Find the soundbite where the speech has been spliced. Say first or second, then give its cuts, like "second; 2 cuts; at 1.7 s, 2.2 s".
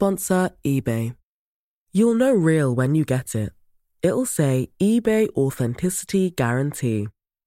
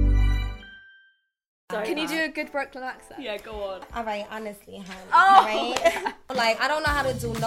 second; 3 cuts; at 1.6 s, 3.8 s, 6.3 s